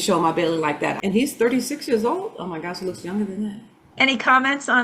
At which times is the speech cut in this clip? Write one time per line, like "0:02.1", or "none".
0:00.9
0:03.8